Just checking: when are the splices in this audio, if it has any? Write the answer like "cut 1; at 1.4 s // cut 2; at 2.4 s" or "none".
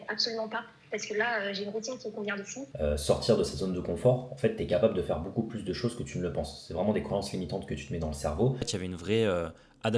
cut 1; at 2.6 s // cut 2; at 8.7 s